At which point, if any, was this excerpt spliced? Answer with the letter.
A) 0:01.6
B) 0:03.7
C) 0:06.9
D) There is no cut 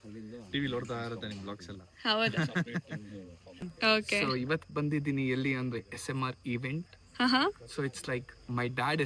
B